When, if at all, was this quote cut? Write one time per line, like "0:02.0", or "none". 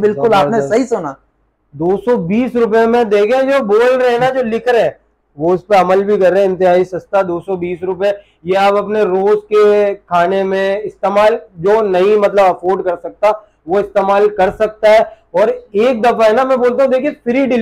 none